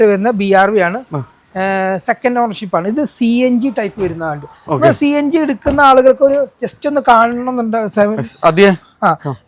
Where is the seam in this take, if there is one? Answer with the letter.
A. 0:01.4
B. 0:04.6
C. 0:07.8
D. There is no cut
D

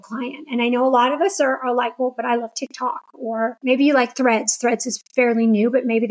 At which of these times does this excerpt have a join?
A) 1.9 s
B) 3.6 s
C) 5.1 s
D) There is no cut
B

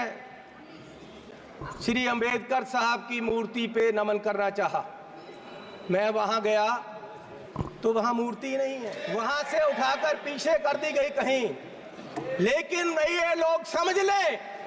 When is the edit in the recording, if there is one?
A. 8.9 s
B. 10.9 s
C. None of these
A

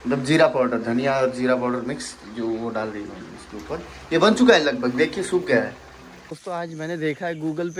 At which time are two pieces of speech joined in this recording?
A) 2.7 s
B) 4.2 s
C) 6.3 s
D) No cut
C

